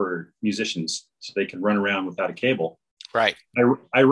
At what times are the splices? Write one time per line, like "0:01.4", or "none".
none